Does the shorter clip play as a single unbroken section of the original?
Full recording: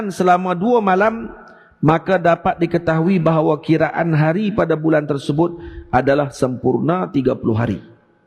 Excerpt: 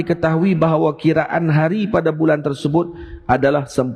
yes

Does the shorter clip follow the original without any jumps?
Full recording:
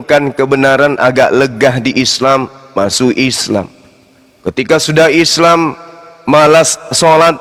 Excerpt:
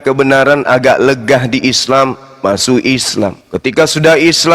no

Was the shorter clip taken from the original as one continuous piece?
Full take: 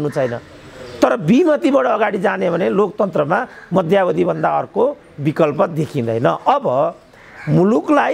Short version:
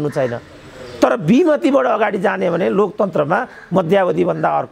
yes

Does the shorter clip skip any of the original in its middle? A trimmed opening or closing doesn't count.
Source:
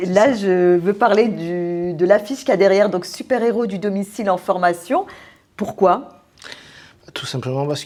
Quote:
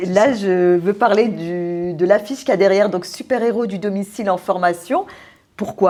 no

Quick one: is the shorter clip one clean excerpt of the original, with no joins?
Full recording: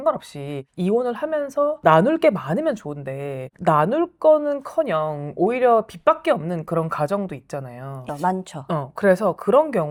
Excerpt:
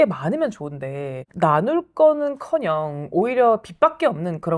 yes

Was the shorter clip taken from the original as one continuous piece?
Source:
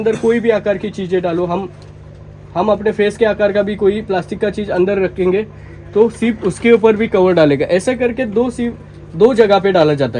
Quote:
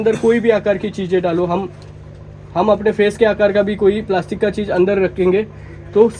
yes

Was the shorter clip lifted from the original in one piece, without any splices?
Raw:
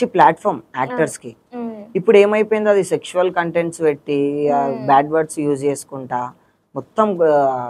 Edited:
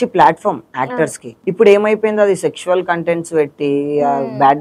no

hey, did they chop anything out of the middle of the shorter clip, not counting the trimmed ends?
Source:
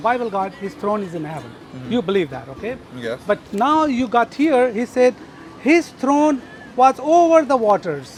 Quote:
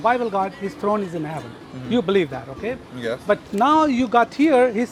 no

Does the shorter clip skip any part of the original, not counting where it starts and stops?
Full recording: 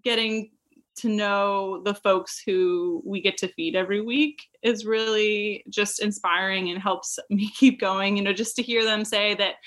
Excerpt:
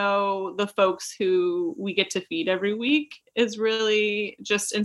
no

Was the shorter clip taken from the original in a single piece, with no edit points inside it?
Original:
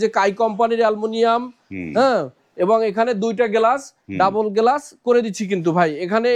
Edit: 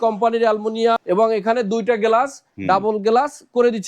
no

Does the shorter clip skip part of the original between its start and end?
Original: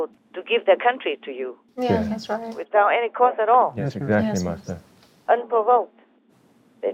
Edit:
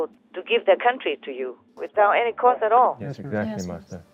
yes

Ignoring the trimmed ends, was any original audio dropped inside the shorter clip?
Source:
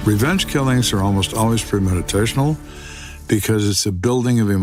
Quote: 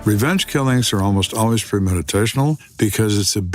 yes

